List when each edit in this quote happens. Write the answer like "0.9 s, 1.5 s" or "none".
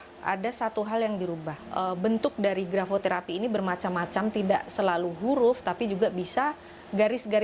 1.5 s

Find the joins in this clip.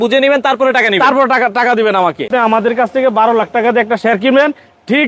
2.3 s

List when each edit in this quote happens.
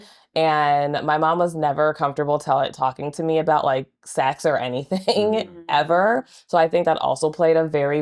none

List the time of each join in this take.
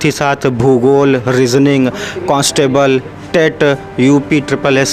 none

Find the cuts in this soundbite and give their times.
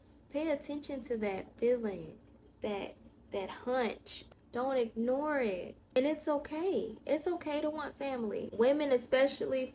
4.1 s, 5.8 s, 8.4 s

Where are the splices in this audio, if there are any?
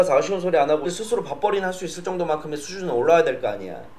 0.9 s

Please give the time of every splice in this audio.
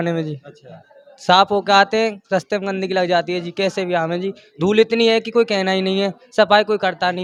none

